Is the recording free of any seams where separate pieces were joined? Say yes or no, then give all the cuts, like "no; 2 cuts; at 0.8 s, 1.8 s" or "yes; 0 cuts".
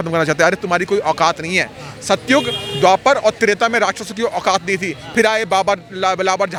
yes; 0 cuts